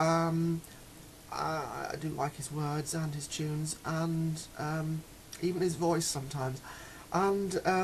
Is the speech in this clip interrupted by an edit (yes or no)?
yes